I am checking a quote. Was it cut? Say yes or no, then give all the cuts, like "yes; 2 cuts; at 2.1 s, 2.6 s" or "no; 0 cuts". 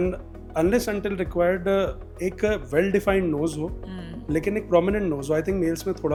no; 0 cuts